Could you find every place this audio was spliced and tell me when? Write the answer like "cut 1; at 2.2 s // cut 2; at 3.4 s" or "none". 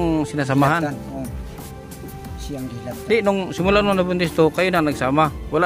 none